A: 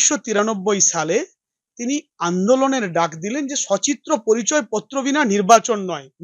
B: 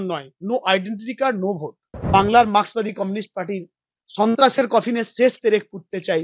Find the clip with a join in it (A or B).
B